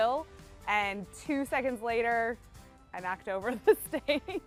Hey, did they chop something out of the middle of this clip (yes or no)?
no